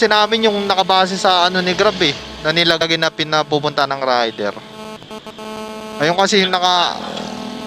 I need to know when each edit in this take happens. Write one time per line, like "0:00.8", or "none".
0:02.8

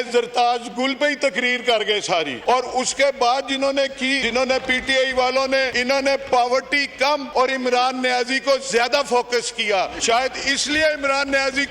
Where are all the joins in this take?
0:02.3
0:04.2
0:05.8
0:07.3
0:10.0

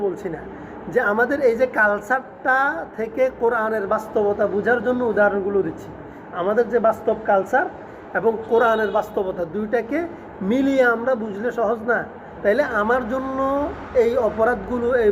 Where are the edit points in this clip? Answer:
none

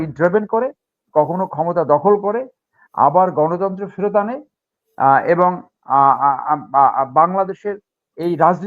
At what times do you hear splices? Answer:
none

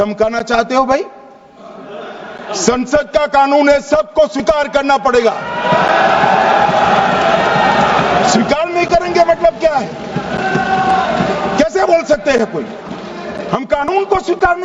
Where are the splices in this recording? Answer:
none

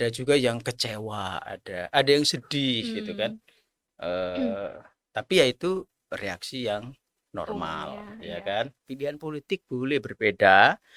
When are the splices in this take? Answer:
0:08.9

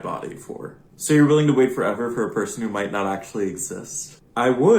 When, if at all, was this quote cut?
0:01.7

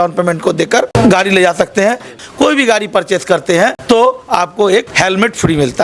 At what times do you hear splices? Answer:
0:02.1
0:03.8
0:04.9

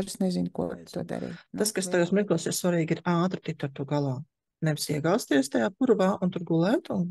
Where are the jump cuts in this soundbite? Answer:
0:01.4

